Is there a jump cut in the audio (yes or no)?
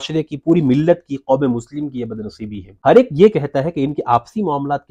yes